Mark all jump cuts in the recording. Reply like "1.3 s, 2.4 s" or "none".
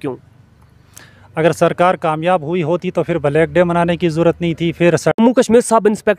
5.2 s